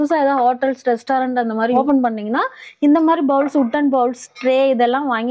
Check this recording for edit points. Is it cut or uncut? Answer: cut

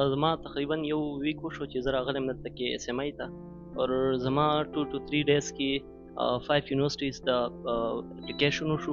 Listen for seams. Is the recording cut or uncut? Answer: uncut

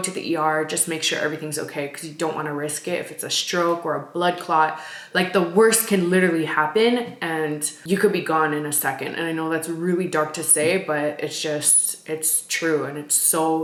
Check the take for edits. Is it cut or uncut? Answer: uncut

